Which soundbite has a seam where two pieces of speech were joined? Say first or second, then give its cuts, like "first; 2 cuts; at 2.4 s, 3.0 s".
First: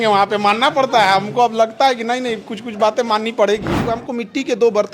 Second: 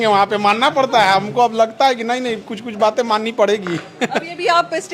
first; 1 cut; at 3.9 s